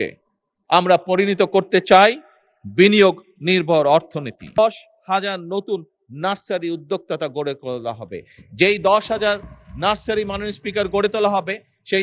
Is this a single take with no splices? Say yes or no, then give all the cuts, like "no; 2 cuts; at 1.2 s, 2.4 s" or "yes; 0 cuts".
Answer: no; 1 cut; at 4.6 s